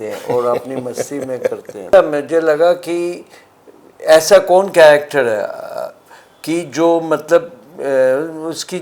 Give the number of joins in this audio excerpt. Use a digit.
1